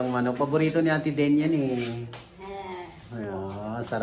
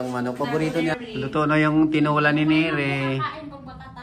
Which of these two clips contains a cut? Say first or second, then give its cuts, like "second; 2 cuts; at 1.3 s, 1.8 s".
second; 1 cut; at 1.0 s